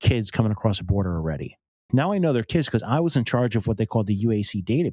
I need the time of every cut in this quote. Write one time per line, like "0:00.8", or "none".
0:01.8